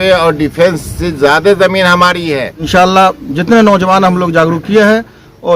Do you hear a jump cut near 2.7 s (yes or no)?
yes